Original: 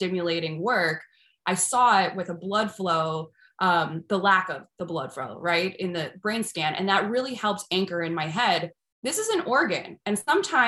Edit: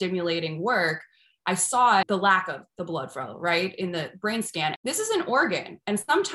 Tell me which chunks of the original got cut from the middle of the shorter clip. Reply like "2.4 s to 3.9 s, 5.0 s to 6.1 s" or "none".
2.1 s to 4.1 s, 6.8 s to 8.9 s